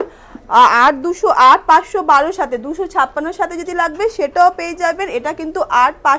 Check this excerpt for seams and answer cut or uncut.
uncut